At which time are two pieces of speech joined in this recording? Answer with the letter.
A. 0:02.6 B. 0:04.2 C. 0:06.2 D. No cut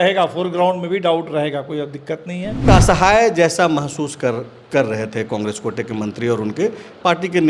A